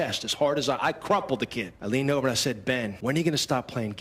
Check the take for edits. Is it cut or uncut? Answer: cut